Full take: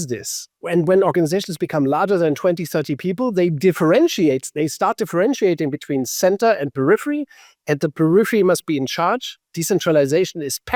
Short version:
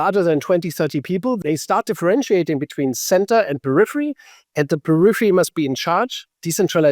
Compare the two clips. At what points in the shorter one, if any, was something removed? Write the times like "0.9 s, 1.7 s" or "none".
1.4 s